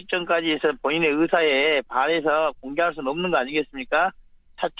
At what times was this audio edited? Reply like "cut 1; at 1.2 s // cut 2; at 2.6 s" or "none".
none